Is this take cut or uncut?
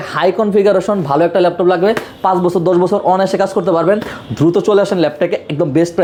uncut